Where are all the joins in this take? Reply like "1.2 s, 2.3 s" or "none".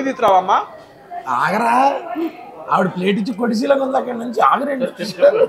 none